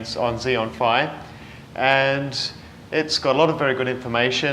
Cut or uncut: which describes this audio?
cut